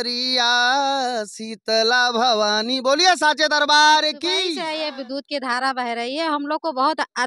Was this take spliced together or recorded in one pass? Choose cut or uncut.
cut